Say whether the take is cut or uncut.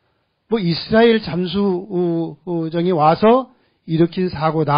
uncut